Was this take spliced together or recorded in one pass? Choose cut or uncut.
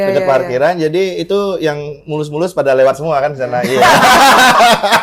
uncut